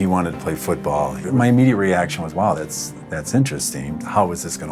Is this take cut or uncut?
cut